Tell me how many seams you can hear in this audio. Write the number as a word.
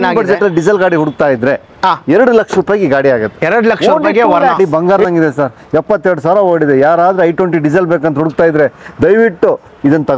one